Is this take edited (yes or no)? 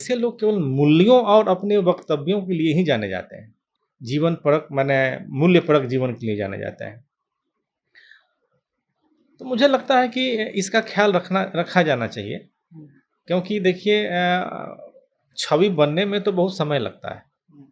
no